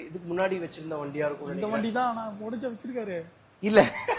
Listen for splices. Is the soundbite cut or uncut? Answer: uncut